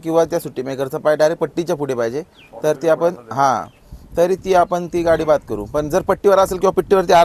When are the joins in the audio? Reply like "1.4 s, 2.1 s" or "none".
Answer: none